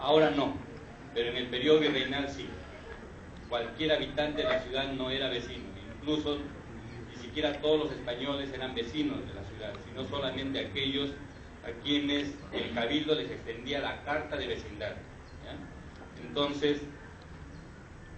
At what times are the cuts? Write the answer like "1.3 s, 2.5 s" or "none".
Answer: 10.5 s